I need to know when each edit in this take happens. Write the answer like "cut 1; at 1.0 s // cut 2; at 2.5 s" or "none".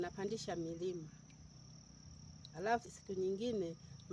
cut 1; at 2.9 s